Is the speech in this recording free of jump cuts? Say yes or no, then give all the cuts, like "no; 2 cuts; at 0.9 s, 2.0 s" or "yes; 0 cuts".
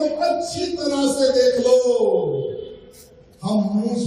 yes; 0 cuts